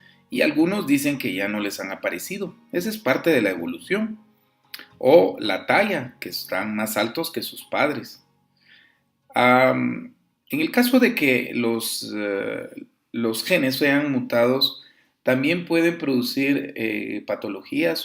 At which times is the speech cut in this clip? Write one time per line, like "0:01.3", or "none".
none

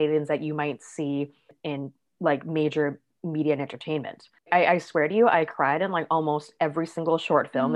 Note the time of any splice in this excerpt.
0:01.7
0:04.4

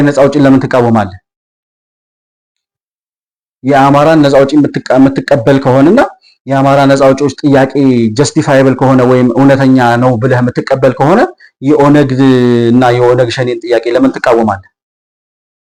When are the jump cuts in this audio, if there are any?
none

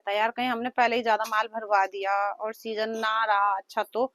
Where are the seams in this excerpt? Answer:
none

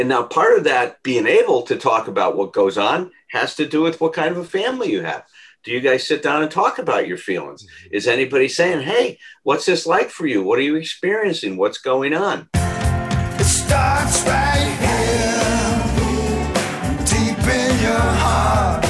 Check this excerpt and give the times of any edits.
0:12.5

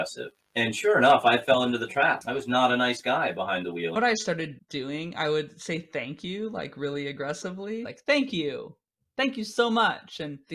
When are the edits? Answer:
0:04.0
0:07.9

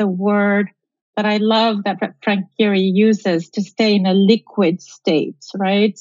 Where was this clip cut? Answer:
none

